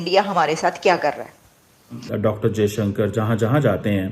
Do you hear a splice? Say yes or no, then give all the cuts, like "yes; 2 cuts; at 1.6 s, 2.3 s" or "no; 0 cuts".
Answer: yes; 1 cut; at 2.2 s